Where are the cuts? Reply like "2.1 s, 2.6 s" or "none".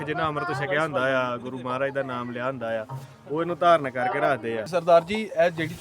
4.6 s